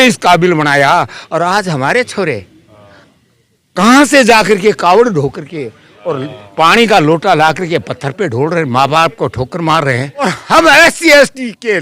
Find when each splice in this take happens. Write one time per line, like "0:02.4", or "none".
0:10.4